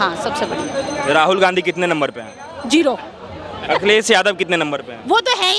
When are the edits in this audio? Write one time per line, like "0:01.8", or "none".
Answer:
0:03.6